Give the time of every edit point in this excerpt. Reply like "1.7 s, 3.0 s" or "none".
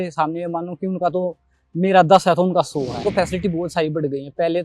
3.0 s